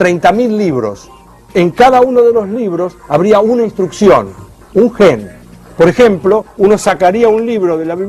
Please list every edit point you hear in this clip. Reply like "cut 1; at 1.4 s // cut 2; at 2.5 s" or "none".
cut 1; at 2.1 s